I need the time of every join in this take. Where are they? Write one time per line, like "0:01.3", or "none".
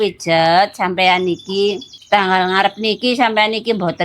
0:01.9